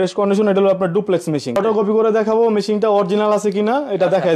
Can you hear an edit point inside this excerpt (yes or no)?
yes